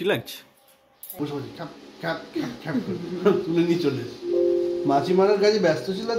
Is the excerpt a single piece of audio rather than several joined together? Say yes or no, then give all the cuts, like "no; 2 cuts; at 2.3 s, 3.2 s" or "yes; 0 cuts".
no; 1 cut; at 1.2 s